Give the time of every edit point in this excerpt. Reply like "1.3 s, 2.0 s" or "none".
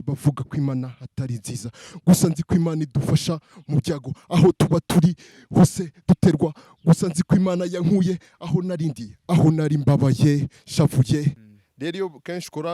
11.4 s